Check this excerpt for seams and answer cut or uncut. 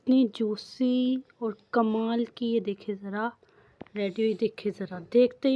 uncut